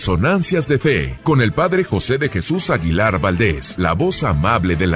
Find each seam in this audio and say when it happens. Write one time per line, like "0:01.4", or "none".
0:01.1
0:03.7